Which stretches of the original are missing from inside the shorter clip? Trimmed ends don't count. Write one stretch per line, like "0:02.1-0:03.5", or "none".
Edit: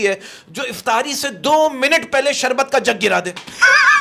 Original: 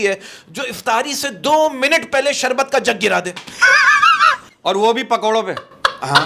none